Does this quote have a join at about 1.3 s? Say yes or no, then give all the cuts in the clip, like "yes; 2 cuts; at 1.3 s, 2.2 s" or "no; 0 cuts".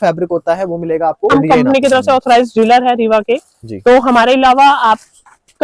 yes; 1 cut; at 1.3 s